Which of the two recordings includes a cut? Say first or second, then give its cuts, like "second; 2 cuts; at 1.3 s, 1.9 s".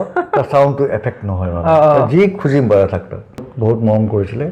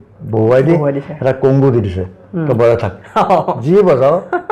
first; 1 cut; at 3.5 s